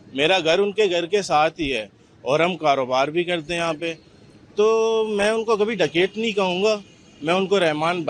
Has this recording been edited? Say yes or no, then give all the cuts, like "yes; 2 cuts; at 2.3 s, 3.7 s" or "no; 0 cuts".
no; 0 cuts